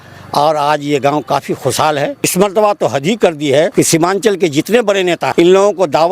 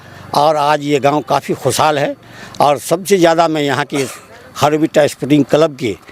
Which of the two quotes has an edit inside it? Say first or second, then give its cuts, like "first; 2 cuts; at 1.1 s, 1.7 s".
first; 1 cut; at 2.2 s